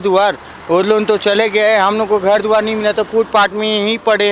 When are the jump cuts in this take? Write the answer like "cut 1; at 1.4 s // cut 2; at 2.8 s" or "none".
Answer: none